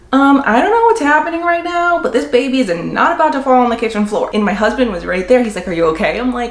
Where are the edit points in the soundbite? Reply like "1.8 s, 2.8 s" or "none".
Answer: 4.3 s